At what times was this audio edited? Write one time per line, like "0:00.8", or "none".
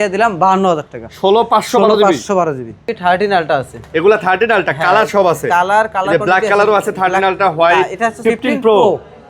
0:02.9
0:08.2